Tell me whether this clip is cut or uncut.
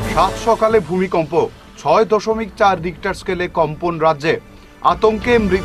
uncut